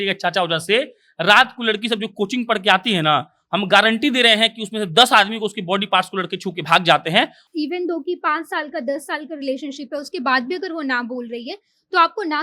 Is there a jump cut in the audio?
yes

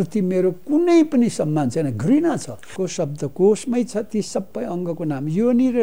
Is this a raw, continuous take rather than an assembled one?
no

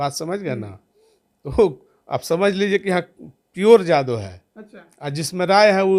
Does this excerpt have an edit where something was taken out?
no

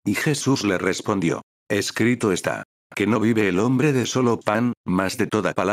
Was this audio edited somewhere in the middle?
yes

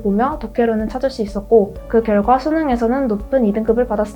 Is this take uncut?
no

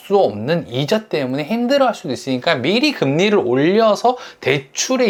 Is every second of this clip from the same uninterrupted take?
yes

